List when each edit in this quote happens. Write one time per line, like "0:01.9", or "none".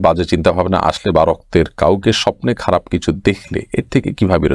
none